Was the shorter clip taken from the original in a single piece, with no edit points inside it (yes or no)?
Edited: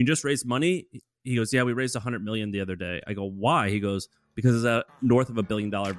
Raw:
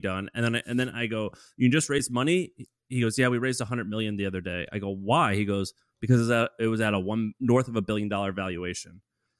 no